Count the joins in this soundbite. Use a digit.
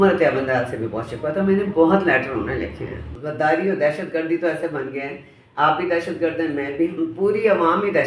1